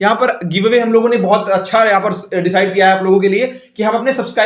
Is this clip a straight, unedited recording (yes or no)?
yes